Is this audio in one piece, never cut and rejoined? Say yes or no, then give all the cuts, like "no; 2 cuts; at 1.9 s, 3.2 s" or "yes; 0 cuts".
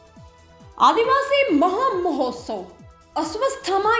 no; 1 cut; at 1.0 s